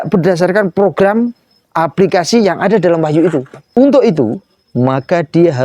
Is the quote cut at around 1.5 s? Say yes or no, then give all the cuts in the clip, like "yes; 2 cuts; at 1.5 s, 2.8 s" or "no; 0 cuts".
no; 1 cut; at 3.7 s